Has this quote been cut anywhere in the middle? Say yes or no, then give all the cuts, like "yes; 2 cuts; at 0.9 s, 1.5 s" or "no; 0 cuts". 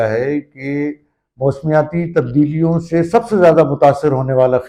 no; 0 cuts